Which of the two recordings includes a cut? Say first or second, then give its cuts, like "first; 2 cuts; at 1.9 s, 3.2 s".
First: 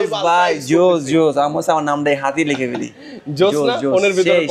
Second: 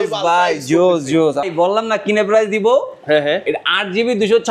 second; 1 cut; at 1.4 s